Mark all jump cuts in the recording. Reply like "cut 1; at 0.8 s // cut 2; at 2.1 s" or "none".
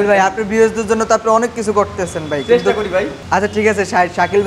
cut 1; at 3.2 s